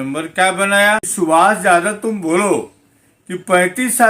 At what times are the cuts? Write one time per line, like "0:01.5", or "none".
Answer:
0:01.1